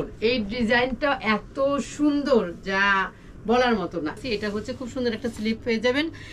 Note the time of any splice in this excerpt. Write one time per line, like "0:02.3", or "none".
0:04.2